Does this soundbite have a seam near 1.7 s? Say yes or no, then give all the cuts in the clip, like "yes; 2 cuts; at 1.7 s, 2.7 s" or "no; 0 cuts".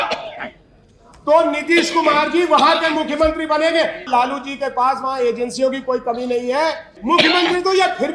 no; 2 cuts; at 4.1 s, 6.9 s